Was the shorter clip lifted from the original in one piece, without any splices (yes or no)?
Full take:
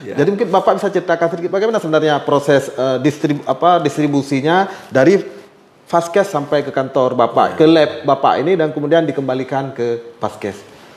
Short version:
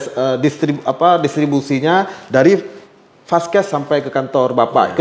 yes